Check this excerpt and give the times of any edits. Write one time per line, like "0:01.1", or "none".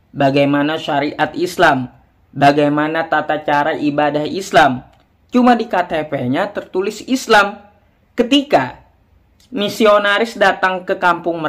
none

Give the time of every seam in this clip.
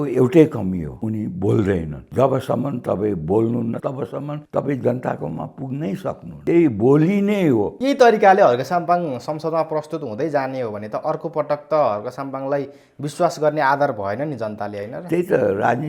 0:00.9
0:02.0
0:03.8
0:06.3
0:07.7

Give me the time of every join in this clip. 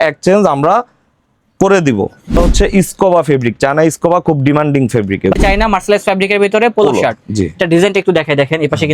0:02.4
0:05.4

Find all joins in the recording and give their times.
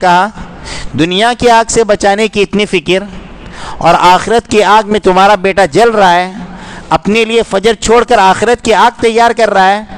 none

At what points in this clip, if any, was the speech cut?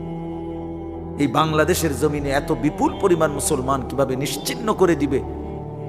0:01.0

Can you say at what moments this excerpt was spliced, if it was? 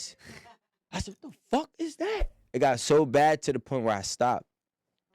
0:02.3

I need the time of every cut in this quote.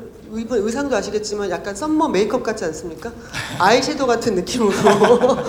none

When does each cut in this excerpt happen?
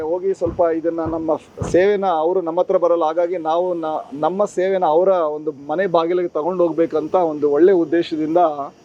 none

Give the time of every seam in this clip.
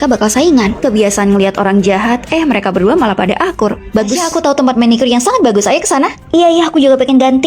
0:04.2

